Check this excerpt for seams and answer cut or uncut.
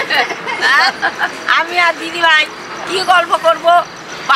uncut